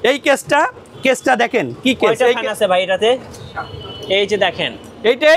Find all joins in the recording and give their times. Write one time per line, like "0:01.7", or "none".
none